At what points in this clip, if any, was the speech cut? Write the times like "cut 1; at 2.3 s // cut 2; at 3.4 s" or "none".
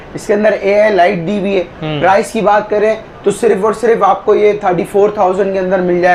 none